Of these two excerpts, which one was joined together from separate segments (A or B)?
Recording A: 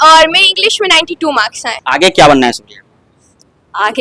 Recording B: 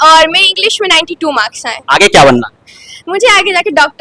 A